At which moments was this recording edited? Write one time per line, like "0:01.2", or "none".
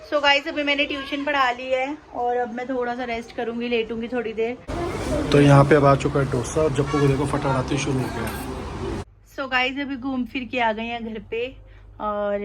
0:04.6
0:09.1